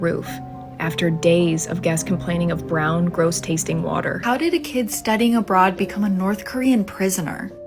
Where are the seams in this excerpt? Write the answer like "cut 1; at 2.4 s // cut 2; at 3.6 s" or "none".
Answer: cut 1; at 4.2 s